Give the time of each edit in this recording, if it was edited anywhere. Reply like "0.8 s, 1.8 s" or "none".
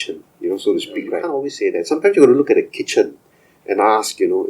1.2 s